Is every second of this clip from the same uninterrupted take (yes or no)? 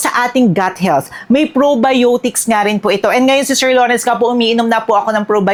yes